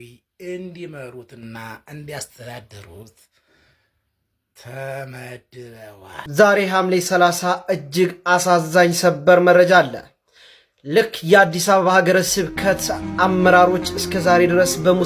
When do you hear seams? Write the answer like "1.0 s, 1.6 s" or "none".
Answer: 6.1 s